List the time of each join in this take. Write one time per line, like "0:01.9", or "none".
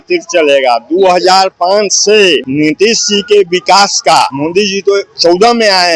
0:02.5
0:04.3